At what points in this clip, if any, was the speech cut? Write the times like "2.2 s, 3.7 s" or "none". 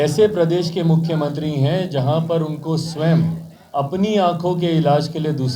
none

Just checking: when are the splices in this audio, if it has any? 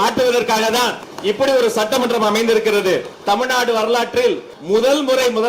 1.0 s, 3.1 s, 4.5 s

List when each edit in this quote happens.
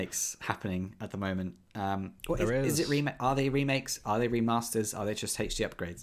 none

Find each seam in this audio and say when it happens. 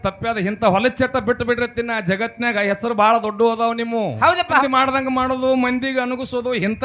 4.6 s

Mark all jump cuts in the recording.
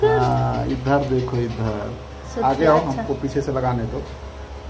2.3 s

